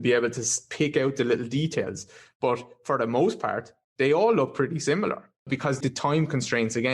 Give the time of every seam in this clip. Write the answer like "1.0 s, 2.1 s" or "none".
5.8 s